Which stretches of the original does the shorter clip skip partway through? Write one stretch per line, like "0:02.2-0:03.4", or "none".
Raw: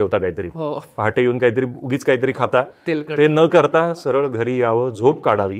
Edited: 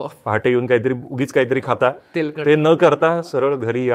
none